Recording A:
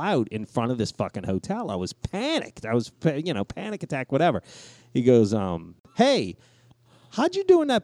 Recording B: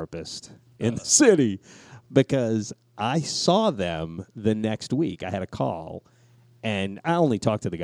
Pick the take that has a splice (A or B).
A